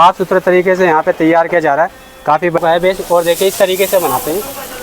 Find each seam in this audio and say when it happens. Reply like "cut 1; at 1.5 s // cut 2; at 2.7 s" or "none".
cut 1; at 2.6 s